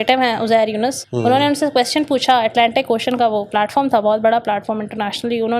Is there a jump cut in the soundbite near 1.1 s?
yes; 1 cut; at 1.1 s

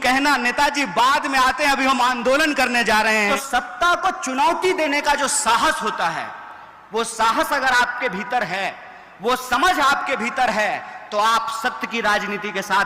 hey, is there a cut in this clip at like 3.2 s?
yes; 1 cut; at 3.2 s

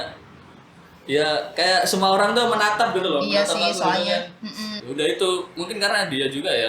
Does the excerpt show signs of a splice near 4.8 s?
yes; 1 cut; at 4.8 s

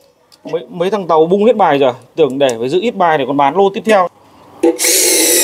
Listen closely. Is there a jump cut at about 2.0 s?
no; 1 cut; at 4.2 s

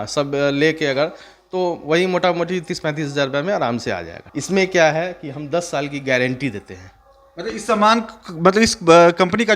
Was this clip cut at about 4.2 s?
yes; 1 cut; at 4.2 s

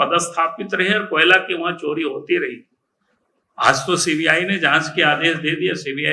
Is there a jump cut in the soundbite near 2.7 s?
no; 0 cuts

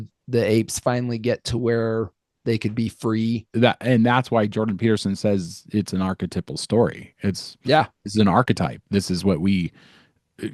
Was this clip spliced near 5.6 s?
no; 1 cut; at 3.5 s

